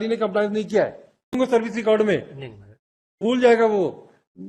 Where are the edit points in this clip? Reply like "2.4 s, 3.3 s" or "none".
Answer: 1.3 s, 3.3 s